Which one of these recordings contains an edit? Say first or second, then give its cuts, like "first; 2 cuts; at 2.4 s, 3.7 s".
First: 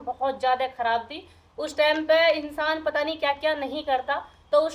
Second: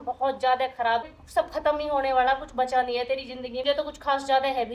second; 2 cuts; at 1.2 s, 3.6 s